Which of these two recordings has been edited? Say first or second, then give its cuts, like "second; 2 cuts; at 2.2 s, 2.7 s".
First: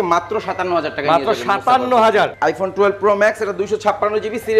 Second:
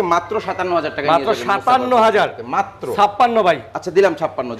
first; 1 cut; at 2.3 s